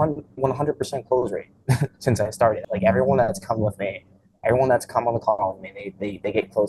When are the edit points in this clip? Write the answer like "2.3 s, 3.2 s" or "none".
2.6 s